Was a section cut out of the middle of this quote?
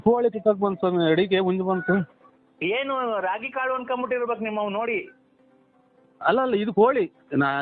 no; 0 cuts

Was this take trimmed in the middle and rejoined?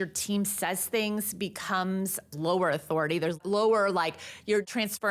yes; 2 cuts; at 2.3 s, 3.4 s

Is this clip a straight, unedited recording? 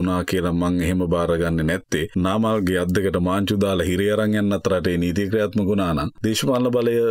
no; 2 cuts; at 2.1 s, 6.1 s

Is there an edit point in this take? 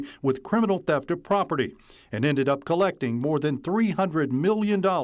no; 0 cuts

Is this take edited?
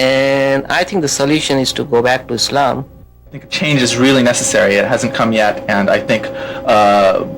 yes; 1 cut; at 3.5 s

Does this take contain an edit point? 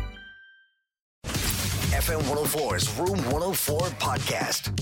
yes; 1 cut; at 1.2 s

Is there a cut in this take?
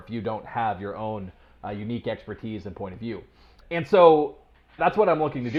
no; 0 cuts

